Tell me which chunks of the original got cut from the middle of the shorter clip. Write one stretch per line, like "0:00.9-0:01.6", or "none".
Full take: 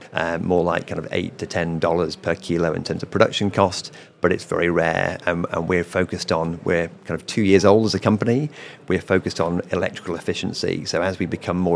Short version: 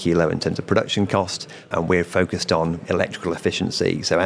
0:04.1-0:05.5
0:06.6-0:09.7